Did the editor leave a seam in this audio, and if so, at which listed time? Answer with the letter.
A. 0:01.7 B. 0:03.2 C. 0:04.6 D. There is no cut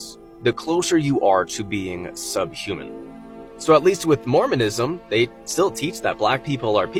D